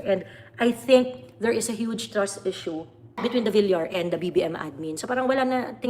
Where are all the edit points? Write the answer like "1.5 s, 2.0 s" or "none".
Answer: 3.2 s